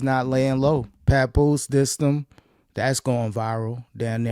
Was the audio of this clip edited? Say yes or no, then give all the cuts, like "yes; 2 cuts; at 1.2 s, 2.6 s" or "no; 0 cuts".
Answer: yes; 1 cut; at 1.0 s